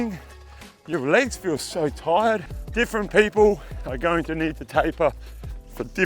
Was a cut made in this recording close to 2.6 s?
yes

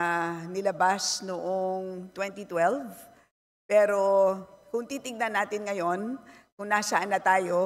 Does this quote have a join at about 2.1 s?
no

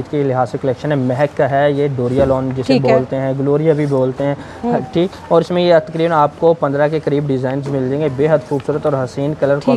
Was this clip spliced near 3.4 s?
no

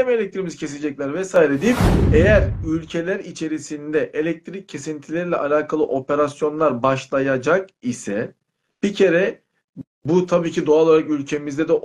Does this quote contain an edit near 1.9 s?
yes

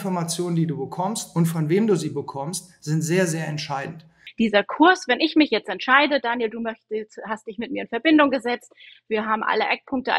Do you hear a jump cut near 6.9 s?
no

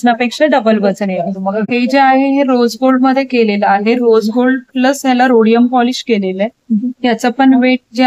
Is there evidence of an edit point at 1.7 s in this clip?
yes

